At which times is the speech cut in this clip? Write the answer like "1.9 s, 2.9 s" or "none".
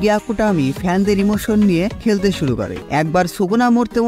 2.8 s